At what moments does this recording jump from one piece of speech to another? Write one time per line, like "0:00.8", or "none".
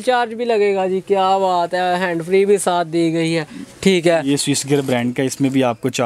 none